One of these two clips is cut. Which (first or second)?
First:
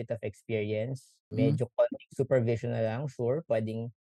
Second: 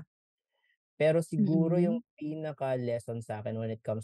first